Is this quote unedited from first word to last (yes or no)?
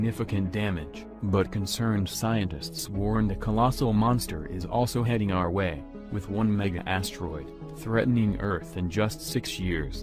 no